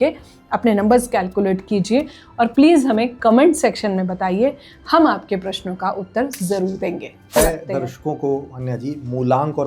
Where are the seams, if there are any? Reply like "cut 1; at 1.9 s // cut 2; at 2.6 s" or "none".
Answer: cut 1; at 7.4 s